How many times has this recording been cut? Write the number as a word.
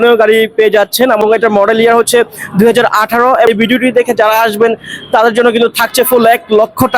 two